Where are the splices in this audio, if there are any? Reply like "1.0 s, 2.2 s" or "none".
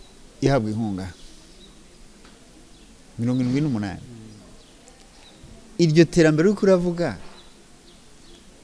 none